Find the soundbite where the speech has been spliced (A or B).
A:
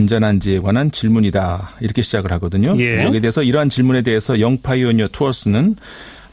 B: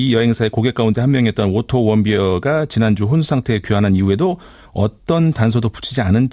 B